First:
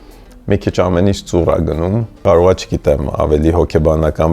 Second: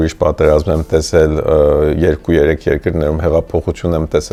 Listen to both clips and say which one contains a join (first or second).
first